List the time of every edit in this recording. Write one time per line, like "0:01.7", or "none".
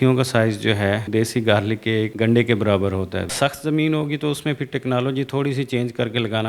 0:01.0
0:02.1
0:03.3